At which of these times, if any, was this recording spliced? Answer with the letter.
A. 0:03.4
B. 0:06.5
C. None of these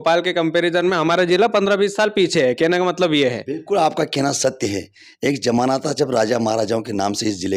C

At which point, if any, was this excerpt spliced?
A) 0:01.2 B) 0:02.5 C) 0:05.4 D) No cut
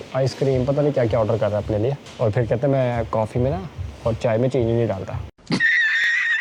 D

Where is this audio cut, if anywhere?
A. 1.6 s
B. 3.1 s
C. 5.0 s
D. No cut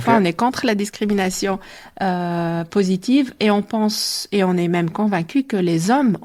D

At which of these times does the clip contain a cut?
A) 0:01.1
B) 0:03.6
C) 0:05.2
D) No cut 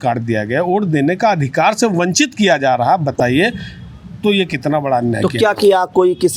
D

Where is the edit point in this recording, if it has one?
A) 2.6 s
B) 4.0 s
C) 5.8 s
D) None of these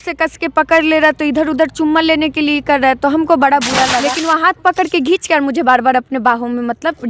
B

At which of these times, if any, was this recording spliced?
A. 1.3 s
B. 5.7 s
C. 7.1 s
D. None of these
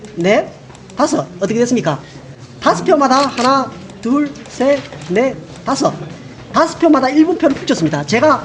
A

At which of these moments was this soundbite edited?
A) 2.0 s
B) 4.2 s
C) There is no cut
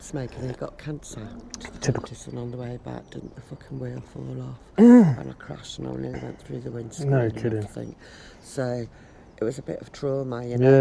A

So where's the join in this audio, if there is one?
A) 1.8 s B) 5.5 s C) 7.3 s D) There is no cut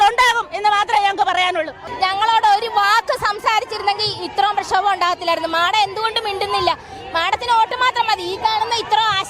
A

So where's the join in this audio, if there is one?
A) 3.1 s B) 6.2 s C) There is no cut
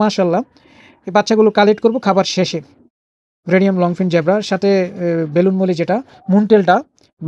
A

